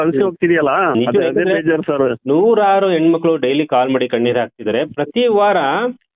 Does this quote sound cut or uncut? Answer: cut